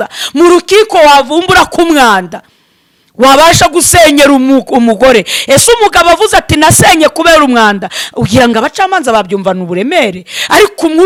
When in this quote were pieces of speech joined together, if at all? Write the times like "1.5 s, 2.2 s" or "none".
none